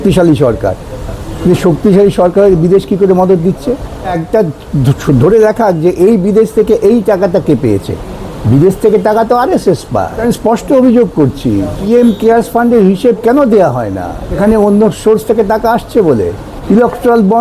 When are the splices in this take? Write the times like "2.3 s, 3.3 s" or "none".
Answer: 4.2 s, 10.2 s, 11.8 s, 14.4 s, 16.5 s